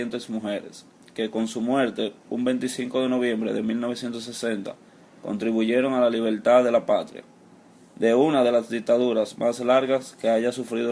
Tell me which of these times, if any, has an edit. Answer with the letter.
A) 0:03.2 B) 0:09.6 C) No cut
B